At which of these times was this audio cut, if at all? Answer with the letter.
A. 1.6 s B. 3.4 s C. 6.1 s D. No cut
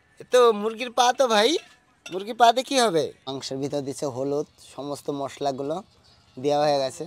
B